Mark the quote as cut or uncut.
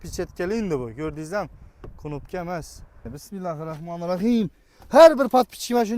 cut